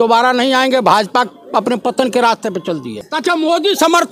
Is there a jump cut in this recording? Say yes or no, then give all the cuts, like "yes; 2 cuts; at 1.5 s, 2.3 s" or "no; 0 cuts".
yes; 1 cut; at 3.1 s